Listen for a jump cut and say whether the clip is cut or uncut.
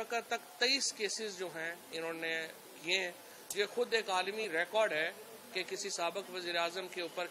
uncut